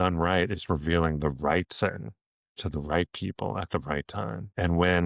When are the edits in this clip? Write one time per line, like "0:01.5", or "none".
none